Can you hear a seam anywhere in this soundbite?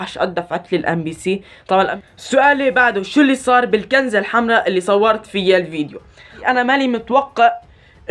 yes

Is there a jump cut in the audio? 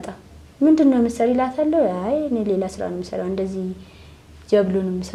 no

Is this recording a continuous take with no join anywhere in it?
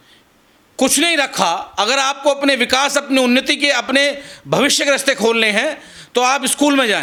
yes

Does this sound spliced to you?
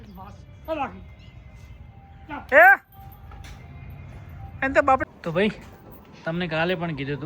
yes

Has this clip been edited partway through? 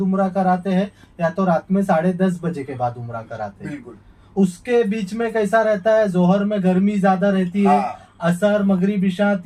no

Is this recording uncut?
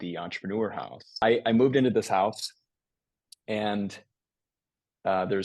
no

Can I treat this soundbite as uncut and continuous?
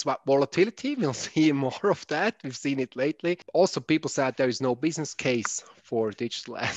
no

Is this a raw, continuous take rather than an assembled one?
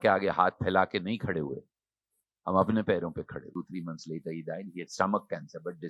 no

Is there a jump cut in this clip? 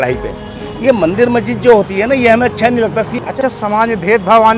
yes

